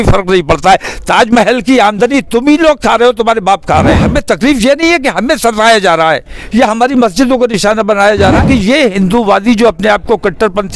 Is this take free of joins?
no; 2 cuts; at 4.0 s, 8.4 s

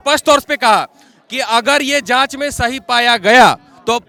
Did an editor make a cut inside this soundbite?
no; 0 cuts

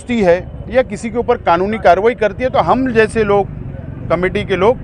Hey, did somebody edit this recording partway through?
no; 0 cuts

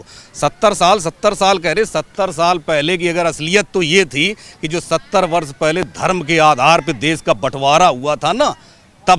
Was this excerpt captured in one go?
yes; 0 cuts

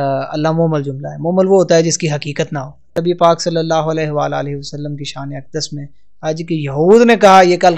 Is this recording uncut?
no; 1 cut; at 2.9 s

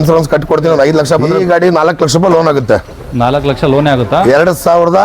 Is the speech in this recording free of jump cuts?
no; 1 cut; at 1.3 s

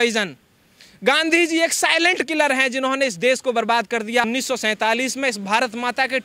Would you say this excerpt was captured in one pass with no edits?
no; 1 cut; at 4.2 s

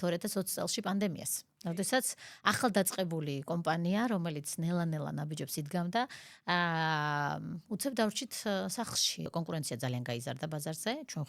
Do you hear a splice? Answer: yes; 1 cut; at 9.3 s

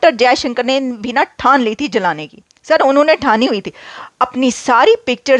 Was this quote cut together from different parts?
no; 0 cuts

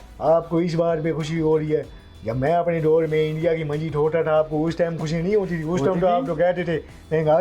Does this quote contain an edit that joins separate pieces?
no; 0 cuts

